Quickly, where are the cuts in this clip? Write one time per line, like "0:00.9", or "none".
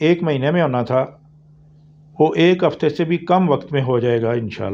none